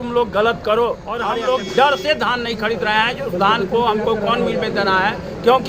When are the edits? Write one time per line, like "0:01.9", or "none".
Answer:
0:01.1

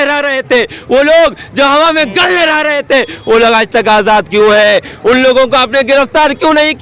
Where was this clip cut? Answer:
none

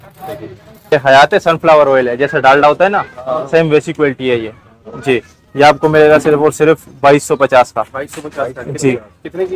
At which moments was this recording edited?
0:00.9

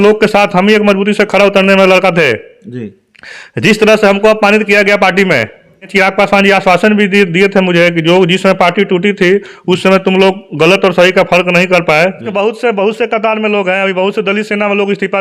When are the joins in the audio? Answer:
0:05.9
0:12.2

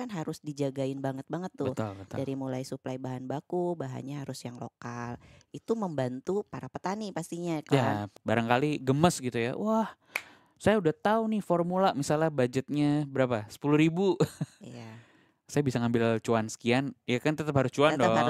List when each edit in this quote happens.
0:08.1

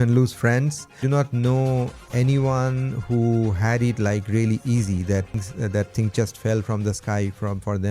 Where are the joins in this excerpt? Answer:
0:01.0
0:05.4

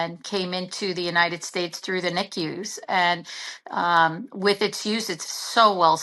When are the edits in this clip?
none

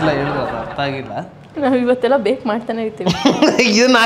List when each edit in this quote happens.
0:01.5

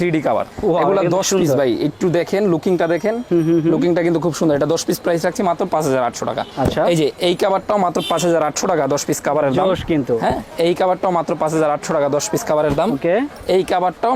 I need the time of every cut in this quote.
none

